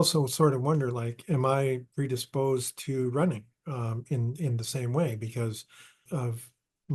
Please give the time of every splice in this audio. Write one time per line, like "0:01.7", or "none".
0:06.0